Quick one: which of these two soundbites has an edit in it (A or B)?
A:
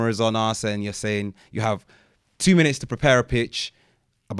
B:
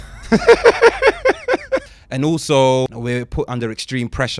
B